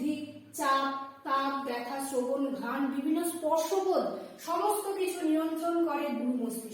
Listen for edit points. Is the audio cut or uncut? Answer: uncut